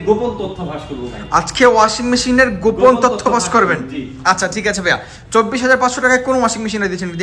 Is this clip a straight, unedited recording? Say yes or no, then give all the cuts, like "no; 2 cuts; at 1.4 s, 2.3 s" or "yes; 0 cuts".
yes; 0 cuts